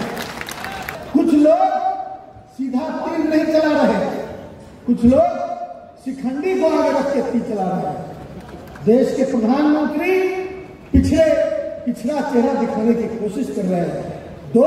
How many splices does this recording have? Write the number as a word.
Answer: one